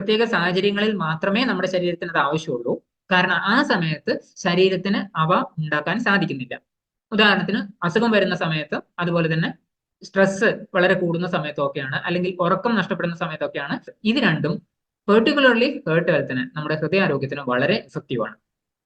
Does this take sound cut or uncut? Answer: cut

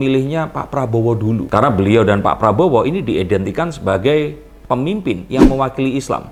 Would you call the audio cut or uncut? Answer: uncut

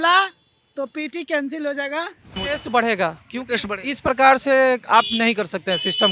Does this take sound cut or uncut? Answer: cut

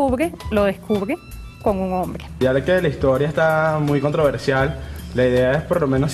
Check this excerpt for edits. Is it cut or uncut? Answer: cut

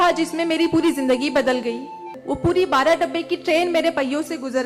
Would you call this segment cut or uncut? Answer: cut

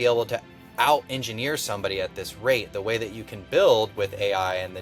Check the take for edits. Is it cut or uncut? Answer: uncut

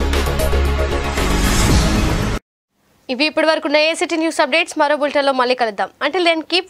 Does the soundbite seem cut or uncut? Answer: uncut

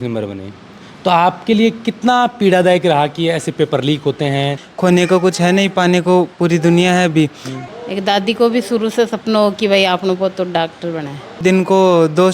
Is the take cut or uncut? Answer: cut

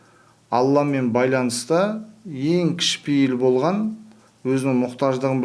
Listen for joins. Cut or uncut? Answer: uncut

